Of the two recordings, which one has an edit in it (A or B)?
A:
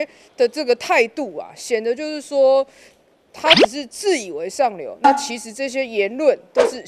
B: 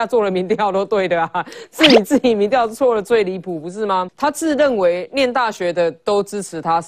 B